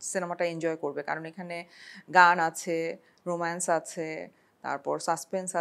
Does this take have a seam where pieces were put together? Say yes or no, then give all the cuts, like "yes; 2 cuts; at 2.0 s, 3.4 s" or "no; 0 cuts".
no; 0 cuts